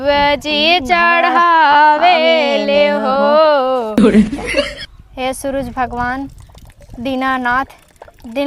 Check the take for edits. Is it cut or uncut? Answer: cut